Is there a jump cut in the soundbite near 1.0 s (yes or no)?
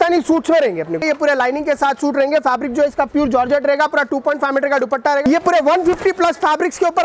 yes